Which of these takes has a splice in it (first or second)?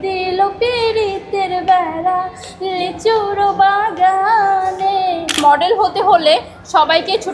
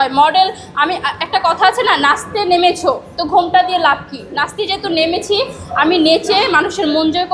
first